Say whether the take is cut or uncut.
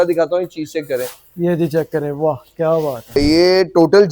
cut